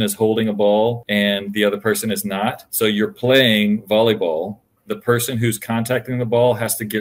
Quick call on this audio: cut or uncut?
cut